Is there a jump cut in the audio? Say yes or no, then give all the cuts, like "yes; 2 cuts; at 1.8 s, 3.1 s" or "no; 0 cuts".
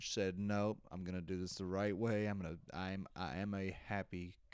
no; 0 cuts